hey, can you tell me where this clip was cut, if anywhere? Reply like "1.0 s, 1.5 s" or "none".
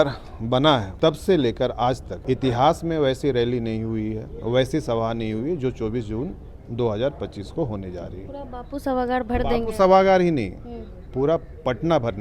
0.9 s, 2.1 s